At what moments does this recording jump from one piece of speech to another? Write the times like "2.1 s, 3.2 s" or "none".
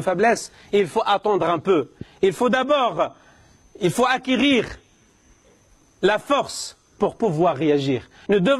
none